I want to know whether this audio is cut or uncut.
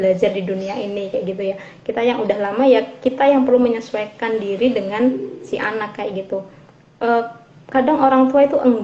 uncut